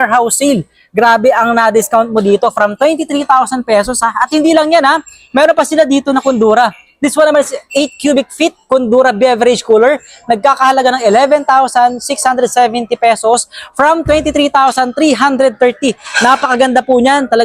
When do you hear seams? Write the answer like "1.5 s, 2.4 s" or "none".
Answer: none